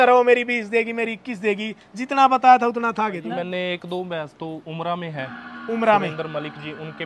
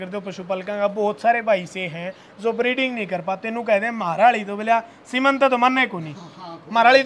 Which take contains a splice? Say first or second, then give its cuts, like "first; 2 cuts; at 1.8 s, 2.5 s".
first; 1 cut; at 3.3 s